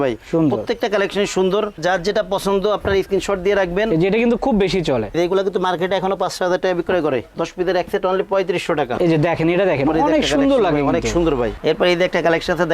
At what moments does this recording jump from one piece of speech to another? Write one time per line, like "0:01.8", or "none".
0:05.1
0:08.9
0:11.6

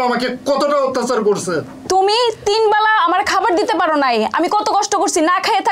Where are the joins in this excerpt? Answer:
0:01.8

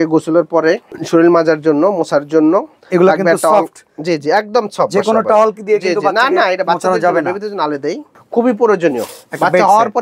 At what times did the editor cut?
0:00.9
0:02.8
0:08.1

